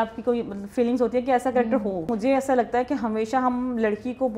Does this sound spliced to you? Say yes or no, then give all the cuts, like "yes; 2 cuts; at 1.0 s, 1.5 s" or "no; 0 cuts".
yes; 1 cut; at 2.1 s